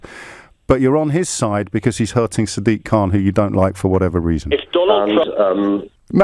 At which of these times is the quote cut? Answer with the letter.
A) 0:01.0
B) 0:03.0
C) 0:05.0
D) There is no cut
C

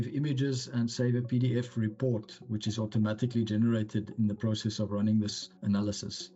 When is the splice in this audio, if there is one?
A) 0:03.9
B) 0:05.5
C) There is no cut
B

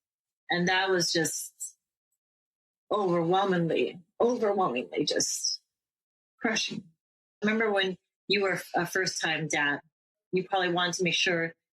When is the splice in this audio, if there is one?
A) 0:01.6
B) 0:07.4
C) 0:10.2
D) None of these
B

